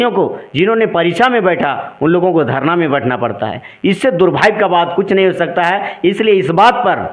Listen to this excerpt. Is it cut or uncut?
uncut